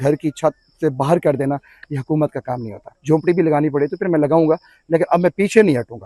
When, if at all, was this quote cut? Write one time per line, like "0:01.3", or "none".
0:02.9